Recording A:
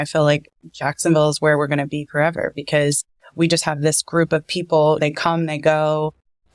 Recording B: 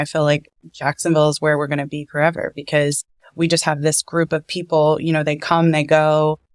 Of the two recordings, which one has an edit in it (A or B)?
A